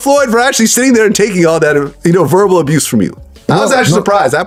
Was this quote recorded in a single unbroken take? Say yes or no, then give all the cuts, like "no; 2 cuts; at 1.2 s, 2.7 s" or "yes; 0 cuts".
yes; 0 cuts